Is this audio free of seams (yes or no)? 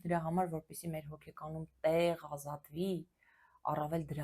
yes